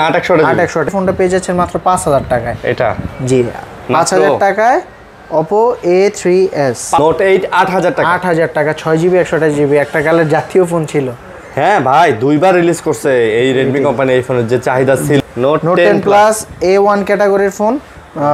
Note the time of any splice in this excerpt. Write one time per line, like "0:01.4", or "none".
0:00.9
0:07.0
0:15.2